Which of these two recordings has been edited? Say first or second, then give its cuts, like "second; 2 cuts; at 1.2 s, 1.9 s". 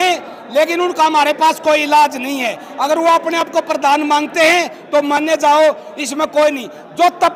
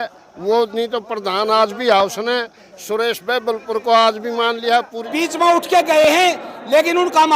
second; 1 cut; at 5.1 s